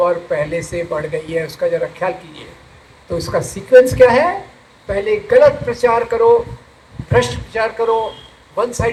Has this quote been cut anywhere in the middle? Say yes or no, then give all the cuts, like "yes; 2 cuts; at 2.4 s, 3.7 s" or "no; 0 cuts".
no; 0 cuts